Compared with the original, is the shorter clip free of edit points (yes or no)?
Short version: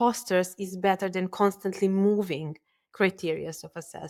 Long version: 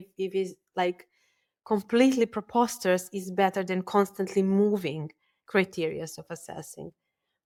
yes